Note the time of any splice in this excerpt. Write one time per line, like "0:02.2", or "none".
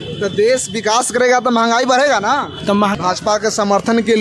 0:02.9